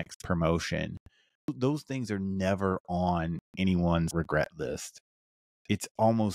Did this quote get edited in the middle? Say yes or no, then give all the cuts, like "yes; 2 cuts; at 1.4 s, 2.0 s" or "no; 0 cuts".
yes; 2 cuts; at 1.5 s, 4.1 s